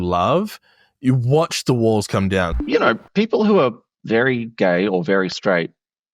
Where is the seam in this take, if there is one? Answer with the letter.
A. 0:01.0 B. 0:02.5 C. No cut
B